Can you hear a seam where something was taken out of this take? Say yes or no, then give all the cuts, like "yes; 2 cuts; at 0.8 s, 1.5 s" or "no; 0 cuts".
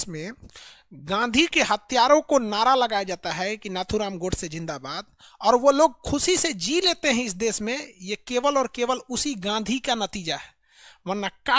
no; 0 cuts